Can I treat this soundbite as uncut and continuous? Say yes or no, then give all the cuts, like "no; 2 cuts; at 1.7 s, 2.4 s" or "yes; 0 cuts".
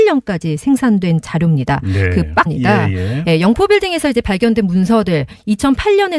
yes; 0 cuts